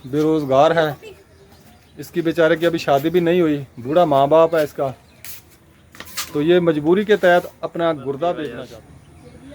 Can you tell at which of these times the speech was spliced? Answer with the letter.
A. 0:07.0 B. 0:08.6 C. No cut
B